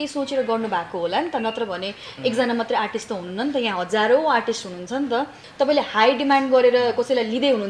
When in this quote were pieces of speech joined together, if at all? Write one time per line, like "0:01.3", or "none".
0:05.4